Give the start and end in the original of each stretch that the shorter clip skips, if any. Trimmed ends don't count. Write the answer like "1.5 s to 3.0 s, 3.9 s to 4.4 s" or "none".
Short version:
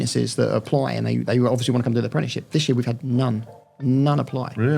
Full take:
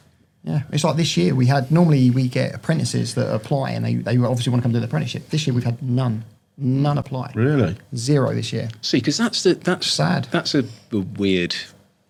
none